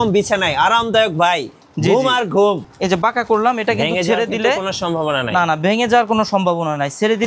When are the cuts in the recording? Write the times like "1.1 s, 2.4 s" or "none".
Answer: 2.6 s